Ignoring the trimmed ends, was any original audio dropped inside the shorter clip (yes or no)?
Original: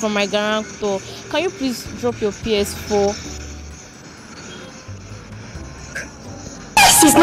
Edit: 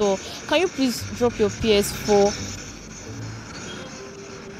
no